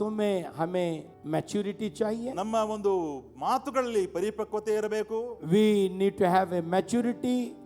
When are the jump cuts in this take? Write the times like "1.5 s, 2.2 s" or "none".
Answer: 1.1 s

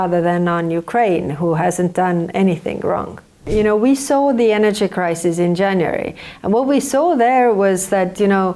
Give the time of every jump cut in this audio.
3.4 s

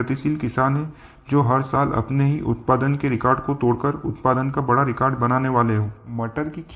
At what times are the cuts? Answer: none

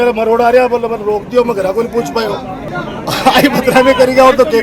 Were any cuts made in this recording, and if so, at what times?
none

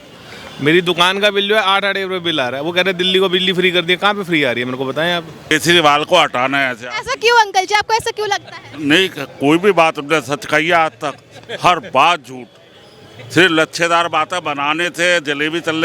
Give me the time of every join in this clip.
5.5 s

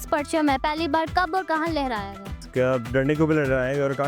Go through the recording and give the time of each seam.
2.4 s

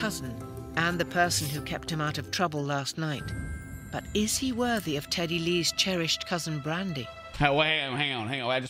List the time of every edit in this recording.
7.2 s

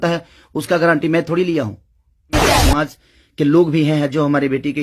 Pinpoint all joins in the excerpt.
2.5 s

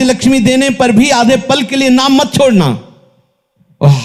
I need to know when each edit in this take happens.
none

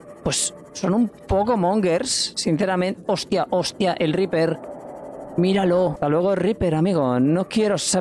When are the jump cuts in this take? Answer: 6.0 s

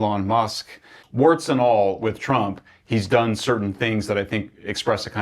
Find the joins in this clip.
1.0 s

